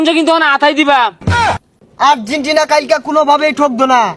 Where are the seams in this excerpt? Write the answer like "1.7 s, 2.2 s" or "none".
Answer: 1.6 s